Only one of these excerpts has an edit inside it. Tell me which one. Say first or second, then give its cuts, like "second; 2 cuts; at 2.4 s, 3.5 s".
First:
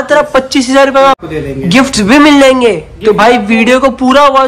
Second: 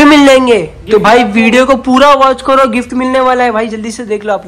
first; 1 cut; at 1.2 s